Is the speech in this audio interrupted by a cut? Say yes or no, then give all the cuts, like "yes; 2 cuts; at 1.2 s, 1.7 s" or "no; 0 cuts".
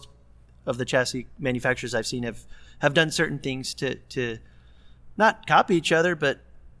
no; 0 cuts